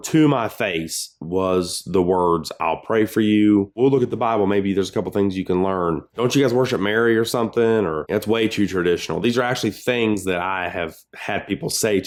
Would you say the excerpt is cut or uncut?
uncut